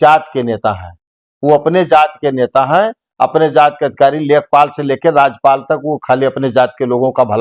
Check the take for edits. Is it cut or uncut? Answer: uncut